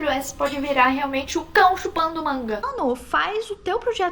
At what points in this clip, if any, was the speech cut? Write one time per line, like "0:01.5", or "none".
0:02.7